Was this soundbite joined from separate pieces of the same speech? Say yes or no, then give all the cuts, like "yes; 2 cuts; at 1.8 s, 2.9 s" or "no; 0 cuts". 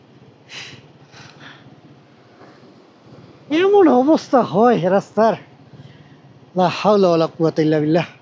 no; 0 cuts